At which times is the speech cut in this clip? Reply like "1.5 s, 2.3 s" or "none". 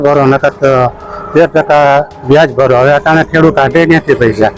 none